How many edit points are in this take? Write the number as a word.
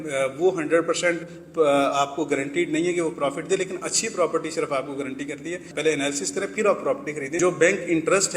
two